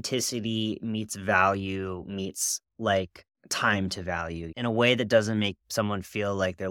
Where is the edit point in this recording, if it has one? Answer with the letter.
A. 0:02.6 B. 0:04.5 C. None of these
B